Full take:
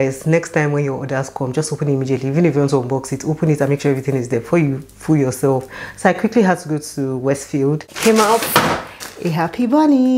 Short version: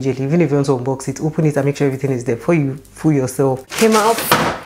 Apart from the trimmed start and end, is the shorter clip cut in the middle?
yes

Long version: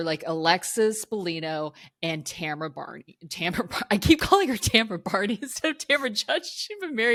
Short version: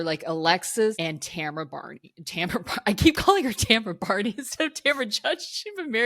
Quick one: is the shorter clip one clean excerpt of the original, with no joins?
no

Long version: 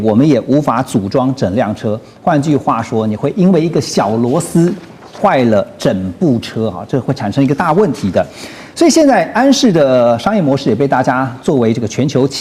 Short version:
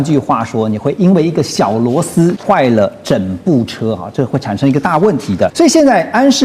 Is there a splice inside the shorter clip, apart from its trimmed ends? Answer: yes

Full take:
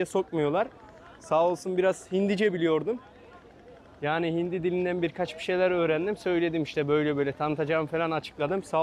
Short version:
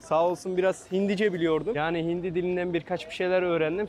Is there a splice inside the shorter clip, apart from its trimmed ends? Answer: yes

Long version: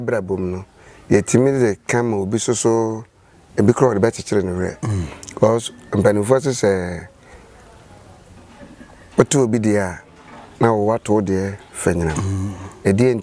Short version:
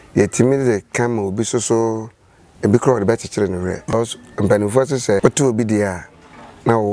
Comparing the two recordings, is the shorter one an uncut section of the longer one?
no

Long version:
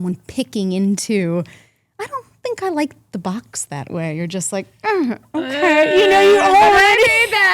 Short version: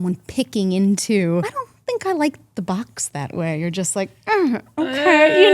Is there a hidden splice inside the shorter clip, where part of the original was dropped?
yes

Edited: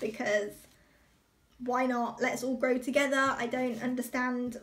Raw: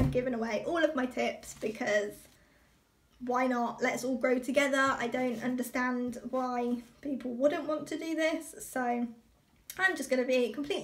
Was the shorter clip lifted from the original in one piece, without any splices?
yes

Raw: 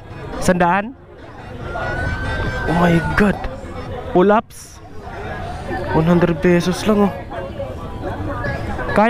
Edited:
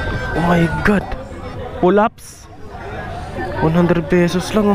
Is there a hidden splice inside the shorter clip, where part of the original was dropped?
no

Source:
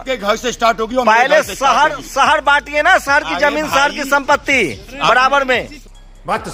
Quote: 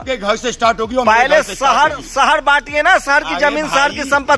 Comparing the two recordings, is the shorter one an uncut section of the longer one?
yes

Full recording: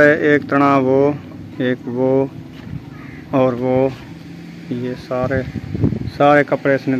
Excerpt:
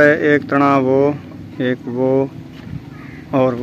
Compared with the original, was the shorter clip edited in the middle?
no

